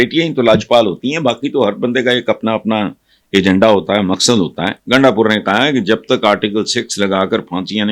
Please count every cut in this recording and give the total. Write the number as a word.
one